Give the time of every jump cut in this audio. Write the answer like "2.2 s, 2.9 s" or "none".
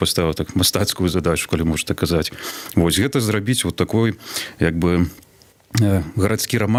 none

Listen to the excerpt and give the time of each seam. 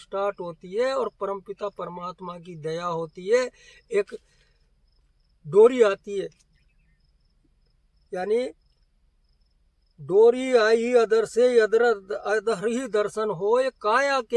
none

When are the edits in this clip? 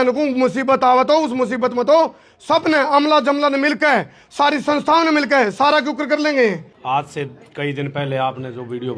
6.7 s

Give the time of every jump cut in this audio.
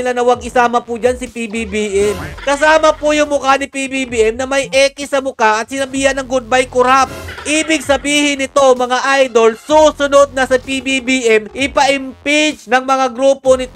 none

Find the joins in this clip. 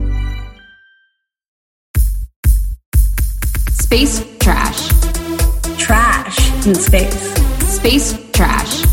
1.7 s

